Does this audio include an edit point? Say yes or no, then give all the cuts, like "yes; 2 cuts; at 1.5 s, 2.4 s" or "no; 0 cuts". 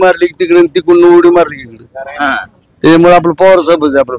no; 0 cuts